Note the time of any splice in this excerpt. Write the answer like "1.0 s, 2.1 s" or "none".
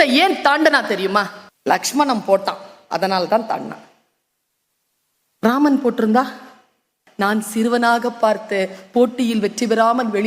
7.0 s